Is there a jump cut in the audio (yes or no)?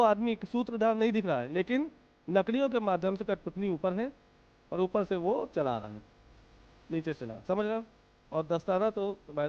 no